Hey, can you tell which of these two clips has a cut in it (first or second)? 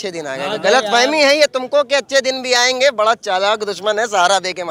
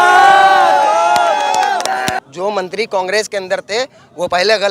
second